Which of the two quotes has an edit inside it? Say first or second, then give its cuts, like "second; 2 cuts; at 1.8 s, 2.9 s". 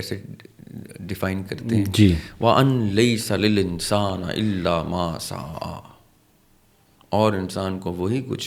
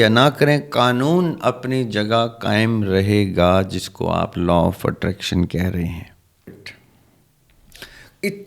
second; 1 cut; at 6.5 s